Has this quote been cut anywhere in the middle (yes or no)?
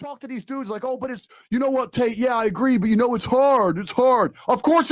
no